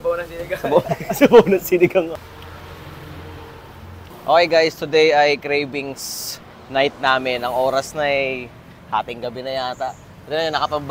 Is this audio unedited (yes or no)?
no